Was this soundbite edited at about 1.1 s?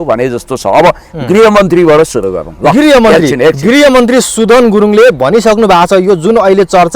no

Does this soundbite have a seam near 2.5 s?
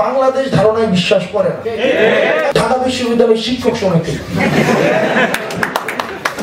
yes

